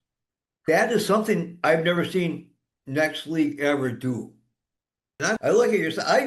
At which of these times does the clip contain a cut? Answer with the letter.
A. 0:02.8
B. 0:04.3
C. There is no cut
C